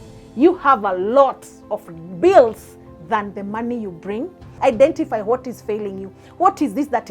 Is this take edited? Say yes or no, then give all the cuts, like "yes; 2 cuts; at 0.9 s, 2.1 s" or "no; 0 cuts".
yes; 1 cut; at 4.4 s